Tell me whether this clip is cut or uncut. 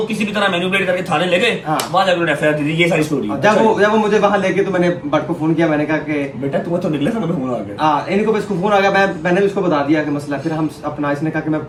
uncut